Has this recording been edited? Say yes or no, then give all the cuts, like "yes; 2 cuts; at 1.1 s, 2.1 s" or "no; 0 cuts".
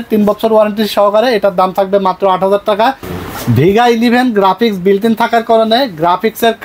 no; 0 cuts